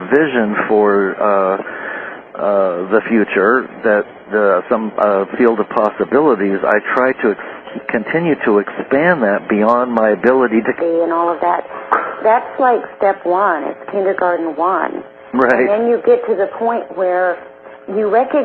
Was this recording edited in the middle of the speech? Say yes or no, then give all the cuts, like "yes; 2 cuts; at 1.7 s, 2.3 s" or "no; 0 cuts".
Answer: no; 0 cuts